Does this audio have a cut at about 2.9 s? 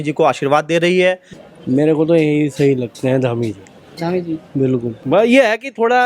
no; 2 cuts; at 1.3 s, 5.0 s

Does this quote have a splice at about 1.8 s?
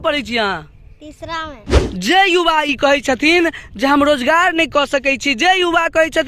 yes; 1 cut; at 1.8 s

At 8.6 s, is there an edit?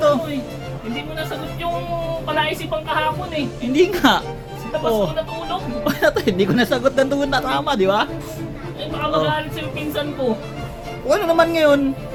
no; 0 cuts

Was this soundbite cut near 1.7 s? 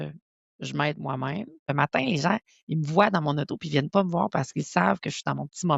yes; 1 cut; at 1.7 s

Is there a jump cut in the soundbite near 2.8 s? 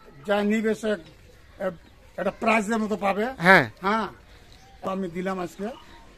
no; 1 cut; at 4.9 s

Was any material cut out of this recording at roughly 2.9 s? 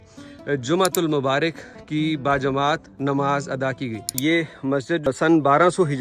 no; 1 cut; at 4.5 s

